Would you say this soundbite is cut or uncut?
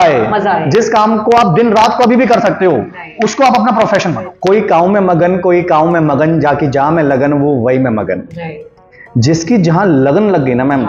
cut